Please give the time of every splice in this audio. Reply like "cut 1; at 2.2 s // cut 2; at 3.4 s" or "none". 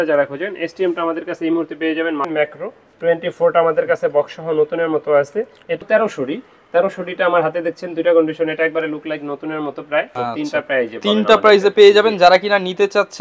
cut 1; at 2.3 s // cut 2; at 5.8 s // cut 3; at 10.1 s